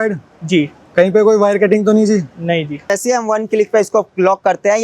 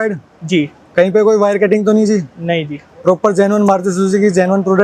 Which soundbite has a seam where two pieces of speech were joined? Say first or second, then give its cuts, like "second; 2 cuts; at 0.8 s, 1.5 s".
first; 1 cut; at 3.0 s